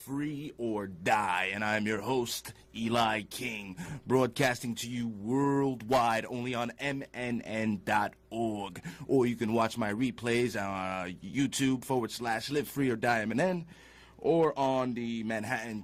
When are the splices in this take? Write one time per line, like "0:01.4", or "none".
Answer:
none